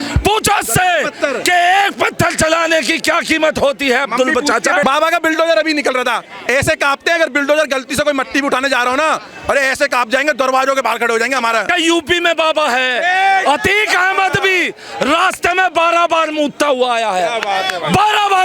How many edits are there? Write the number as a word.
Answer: two